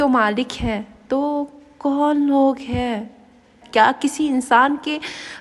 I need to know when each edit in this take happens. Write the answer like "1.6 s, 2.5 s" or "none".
3.5 s